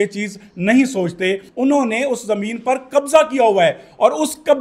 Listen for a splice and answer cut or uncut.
cut